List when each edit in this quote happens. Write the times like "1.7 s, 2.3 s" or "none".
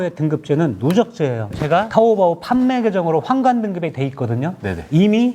1.5 s